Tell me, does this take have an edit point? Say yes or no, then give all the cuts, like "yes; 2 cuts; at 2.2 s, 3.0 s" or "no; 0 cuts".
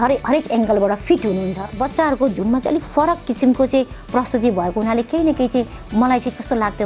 yes; 1 cut; at 1.8 s